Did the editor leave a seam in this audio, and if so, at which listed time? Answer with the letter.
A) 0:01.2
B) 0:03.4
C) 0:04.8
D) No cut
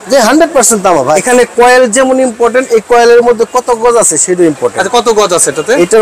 A